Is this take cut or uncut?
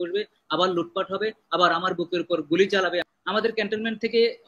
cut